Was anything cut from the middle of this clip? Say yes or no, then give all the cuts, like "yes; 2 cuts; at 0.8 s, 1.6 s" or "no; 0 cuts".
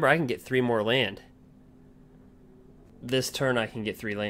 yes; 1 cut; at 2.9 s